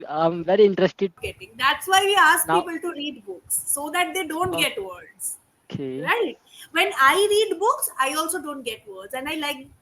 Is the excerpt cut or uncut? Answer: cut